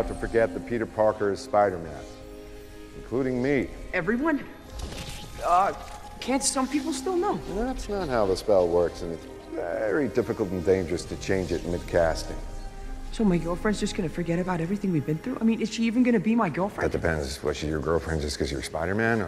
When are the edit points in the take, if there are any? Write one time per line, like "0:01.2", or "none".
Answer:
0:01.8